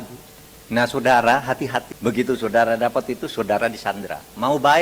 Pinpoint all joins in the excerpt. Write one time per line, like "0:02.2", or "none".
0:01.9